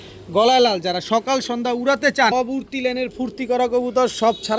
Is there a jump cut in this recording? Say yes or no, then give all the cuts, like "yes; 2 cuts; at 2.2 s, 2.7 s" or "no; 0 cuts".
yes; 1 cut; at 2.3 s